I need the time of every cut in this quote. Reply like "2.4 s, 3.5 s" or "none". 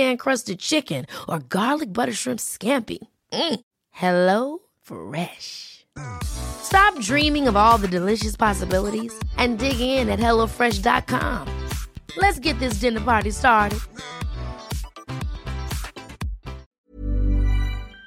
16.6 s